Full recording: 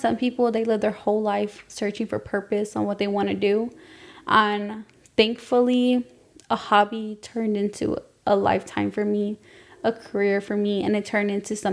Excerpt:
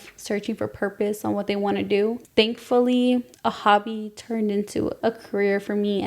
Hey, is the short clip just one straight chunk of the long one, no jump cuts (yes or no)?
no